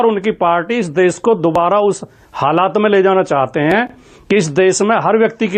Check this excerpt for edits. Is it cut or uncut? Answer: uncut